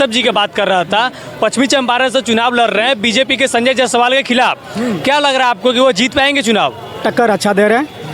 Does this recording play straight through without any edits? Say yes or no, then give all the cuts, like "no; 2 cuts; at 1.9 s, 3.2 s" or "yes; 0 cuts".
yes; 0 cuts